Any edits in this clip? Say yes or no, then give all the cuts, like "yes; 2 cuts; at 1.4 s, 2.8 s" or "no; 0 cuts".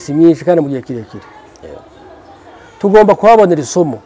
no; 0 cuts